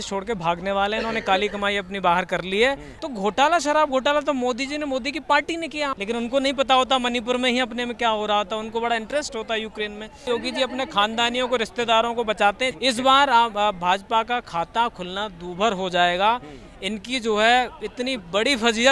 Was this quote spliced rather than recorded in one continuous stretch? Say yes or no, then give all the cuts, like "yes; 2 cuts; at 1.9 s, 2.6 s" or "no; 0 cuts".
yes; 4 cuts; at 2.9 s, 5.9 s, 10.3 s, 12.7 s